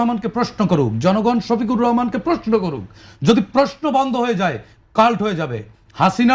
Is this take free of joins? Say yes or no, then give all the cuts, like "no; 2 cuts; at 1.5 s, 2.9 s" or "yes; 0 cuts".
yes; 0 cuts